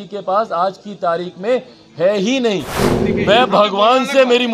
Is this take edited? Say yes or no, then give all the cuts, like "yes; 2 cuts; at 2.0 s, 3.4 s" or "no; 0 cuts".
yes; 1 cut; at 2.8 s